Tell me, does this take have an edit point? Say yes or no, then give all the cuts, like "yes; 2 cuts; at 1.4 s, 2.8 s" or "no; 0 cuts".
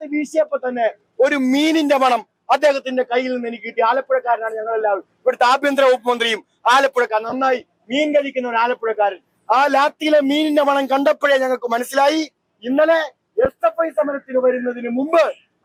no; 0 cuts